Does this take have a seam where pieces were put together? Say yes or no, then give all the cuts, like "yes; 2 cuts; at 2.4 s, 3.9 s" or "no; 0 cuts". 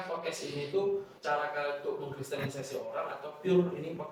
no; 0 cuts